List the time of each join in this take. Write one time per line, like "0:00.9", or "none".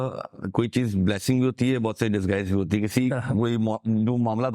none